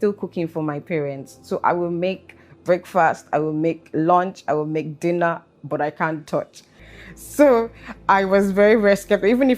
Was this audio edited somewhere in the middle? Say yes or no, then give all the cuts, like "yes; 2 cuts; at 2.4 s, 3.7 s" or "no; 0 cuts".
yes; 1 cut; at 6.8 s